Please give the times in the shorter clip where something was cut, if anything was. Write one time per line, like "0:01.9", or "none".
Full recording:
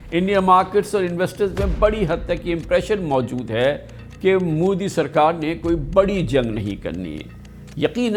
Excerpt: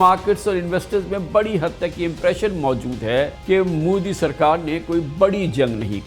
0:03.4